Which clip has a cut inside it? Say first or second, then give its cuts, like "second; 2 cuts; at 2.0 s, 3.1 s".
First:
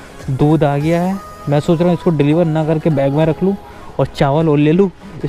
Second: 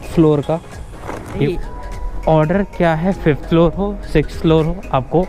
second; 1 cut; at 1.5 s